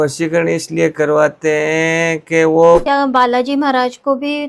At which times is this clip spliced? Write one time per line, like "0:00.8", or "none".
0:02.8